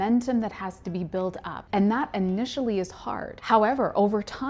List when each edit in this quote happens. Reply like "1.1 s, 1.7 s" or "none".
1.5 s, 3.3 s